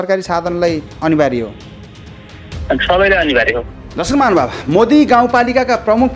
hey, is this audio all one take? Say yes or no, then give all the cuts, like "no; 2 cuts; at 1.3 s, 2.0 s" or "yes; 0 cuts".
no; 1 cut; at 3.7 s